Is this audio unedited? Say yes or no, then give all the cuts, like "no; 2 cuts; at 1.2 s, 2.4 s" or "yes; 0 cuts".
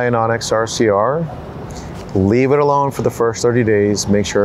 yes; 0 cuts